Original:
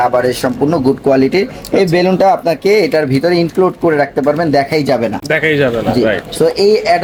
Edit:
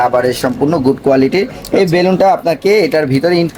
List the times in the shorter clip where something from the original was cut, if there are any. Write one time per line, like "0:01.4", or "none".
none

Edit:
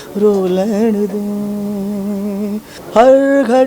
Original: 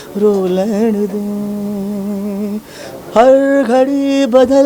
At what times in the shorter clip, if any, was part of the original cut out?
0:02.8

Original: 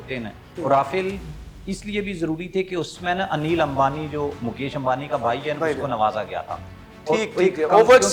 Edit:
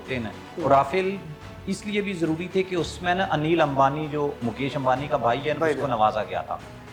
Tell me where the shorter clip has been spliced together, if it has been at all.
none

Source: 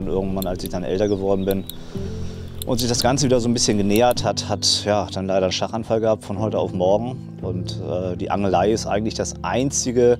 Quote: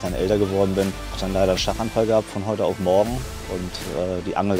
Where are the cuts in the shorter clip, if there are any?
0:01.2

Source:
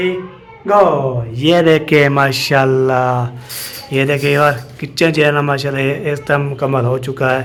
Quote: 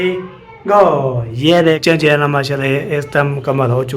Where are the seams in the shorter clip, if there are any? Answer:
0:01.8

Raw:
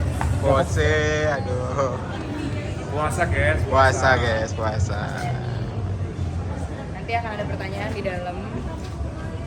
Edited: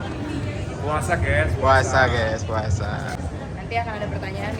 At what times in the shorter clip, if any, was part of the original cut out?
0:03.1

